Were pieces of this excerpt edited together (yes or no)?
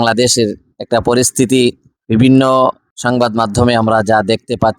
yes